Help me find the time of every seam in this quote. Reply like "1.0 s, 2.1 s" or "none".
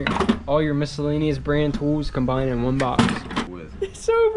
3.3 s